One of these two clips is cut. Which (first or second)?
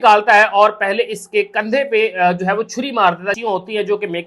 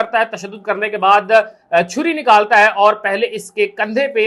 first